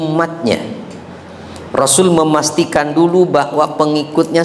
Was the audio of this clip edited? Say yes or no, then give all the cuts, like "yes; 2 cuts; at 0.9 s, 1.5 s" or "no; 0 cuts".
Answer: no; 0 cuts